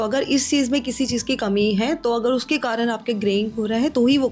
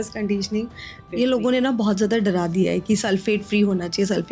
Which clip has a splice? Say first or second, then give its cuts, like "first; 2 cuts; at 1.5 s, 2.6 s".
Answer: second; 1 cut; at 1.0 s